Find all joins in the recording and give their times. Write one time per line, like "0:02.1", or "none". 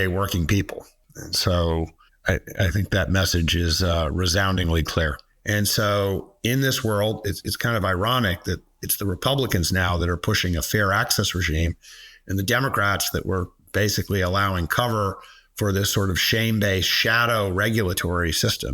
0:01.0
0:02.0
0:05.3

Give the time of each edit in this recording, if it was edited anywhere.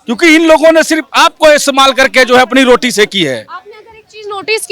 none

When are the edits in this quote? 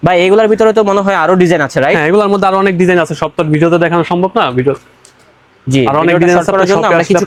none

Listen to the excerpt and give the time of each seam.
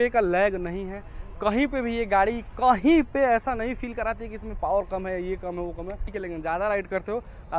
0:06.1

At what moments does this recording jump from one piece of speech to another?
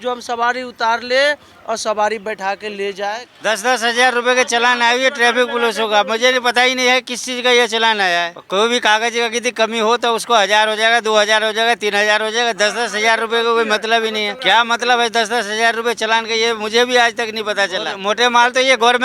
0:03.3
0:08.4
0:14.3
0:18.0

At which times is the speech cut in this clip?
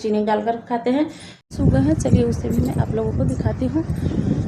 0:01.5

